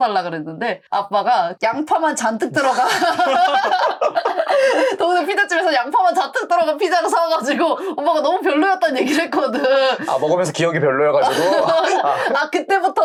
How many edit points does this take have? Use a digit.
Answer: 0